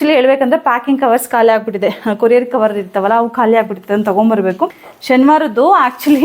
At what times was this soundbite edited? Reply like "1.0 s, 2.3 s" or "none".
4.9 s